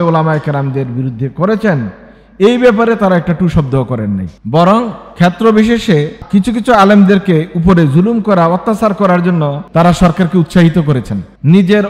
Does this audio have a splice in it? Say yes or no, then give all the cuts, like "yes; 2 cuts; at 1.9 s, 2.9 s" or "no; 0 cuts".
yes; 2 cuts; at 6.2 s, 9.6 s